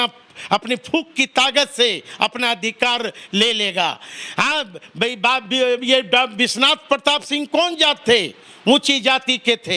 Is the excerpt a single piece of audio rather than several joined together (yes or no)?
yes